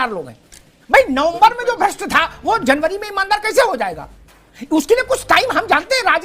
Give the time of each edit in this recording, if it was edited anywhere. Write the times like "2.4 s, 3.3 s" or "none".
none